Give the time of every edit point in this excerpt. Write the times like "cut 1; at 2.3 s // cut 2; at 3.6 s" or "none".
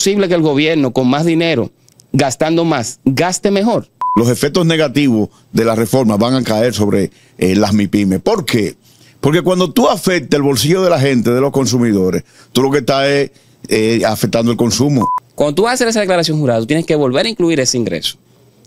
cut 1; at 4.0 s // cut 2; at 15.1 s